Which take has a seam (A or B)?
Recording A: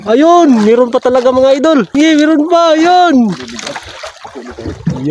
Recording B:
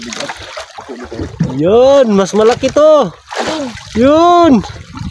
A